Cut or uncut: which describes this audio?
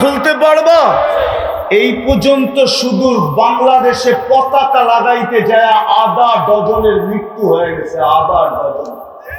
uncut